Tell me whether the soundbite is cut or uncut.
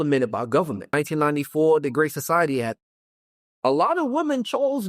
cut